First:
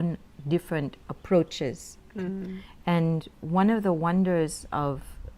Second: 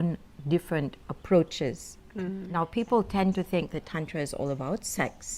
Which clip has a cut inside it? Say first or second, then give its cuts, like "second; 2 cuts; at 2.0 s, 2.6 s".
second; 1 cut; at 2.4 s